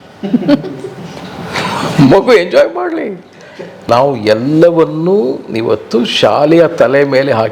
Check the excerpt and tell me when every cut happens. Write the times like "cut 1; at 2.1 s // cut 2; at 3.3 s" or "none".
cut 1; at 3.8 s